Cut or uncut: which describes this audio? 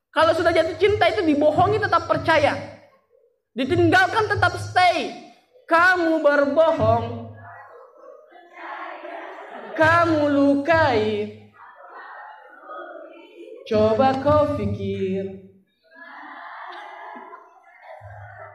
uncut